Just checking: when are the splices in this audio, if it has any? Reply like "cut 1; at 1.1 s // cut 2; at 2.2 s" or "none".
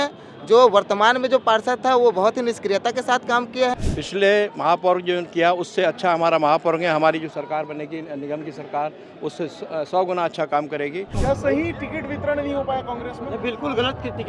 cut 1; at 3.8 s // cut 2; at 11.1 s